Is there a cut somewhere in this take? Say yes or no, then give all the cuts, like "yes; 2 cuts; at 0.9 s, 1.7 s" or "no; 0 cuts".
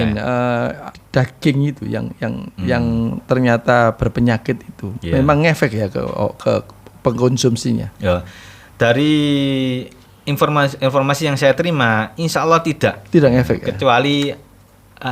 yes; 1 cut; at 1.0 s